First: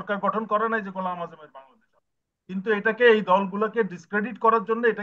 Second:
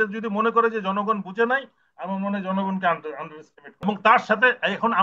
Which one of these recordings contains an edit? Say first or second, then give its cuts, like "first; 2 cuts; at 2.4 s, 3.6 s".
second; 1 cut; at 3.8 s